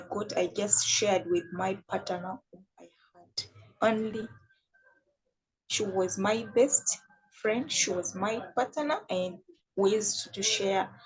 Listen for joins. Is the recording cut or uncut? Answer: uncut